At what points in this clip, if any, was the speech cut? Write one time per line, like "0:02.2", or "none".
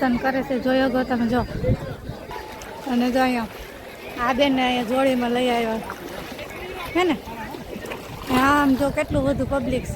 0:02.3